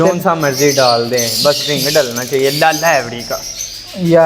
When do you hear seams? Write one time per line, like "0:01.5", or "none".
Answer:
none

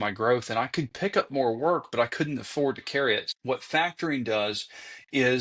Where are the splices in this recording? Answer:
0:03.3

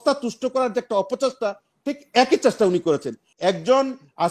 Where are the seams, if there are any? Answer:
0:03.2

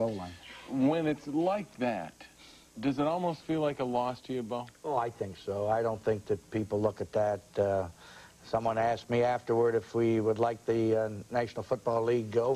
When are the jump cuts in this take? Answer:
none

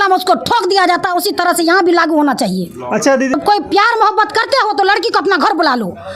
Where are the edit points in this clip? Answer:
0:03.3

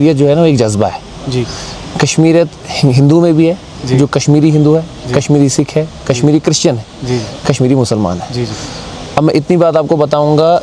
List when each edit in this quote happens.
none

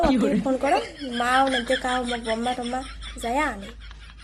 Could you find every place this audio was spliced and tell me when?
none

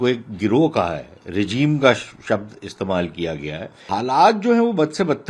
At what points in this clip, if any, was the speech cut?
0:03.9

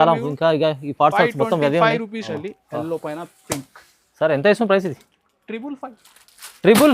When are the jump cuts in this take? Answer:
0:02.3

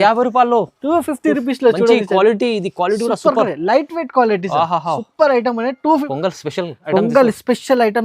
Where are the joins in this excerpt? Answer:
0:06.1

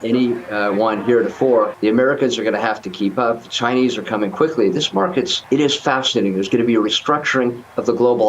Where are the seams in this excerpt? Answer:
0:01.7
0:05.4

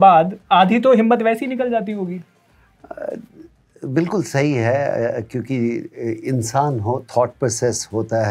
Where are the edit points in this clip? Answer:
none

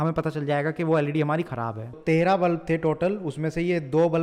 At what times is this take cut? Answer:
0:02.0

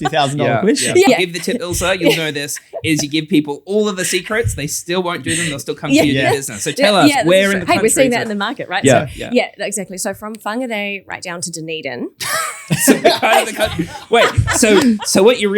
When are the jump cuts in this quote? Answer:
0:01.1

